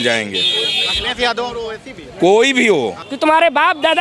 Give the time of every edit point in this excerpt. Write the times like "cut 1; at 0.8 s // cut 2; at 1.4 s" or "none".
cut 1; at 3.0 s